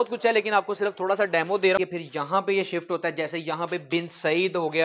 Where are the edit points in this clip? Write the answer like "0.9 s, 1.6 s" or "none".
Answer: 1.8 s